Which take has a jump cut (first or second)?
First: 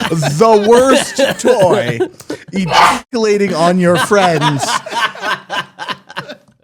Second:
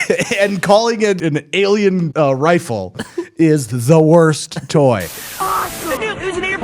second